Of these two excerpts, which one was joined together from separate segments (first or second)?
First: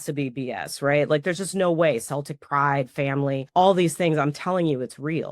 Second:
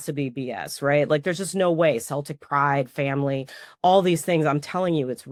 first